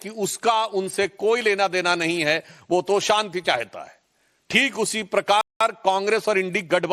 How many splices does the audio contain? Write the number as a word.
zero